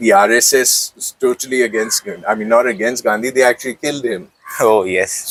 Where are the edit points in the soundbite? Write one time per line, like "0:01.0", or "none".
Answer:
none